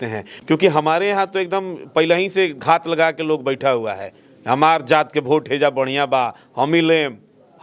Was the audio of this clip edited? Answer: no; 0 cuts

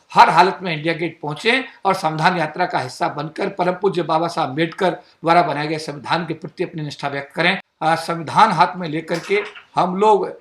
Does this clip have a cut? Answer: yes; 1 cut; at 7.7 s

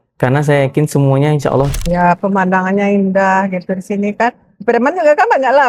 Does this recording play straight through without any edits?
no; 1 cut; at 1.8 s

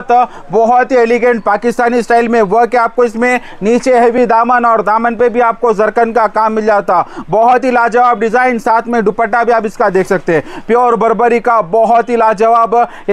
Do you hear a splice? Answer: no; 0 cuts

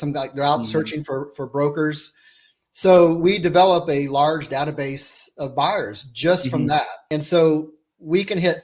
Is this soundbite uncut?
no; 1 cut; at 7.0 s

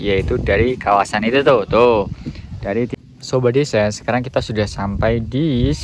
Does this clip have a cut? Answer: yes; 1 cut; at 3.0 s

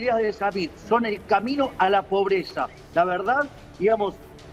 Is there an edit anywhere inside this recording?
no; 0 cuts

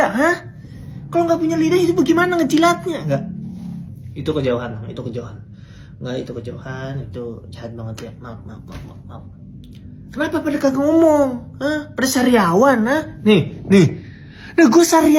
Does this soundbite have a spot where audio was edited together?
no; 0 cuts

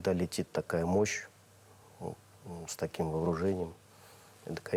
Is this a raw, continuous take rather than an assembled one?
yes; 0 cuts

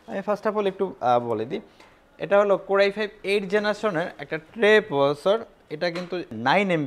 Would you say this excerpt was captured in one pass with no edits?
yes; 0 cuts

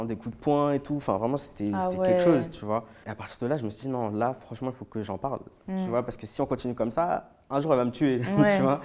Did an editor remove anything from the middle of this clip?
no; 0 cuts

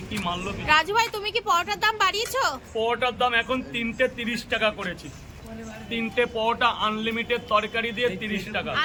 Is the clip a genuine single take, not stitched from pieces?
yes; 0 cuts

